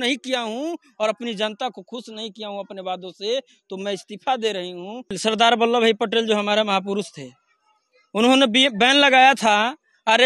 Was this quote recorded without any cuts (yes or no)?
no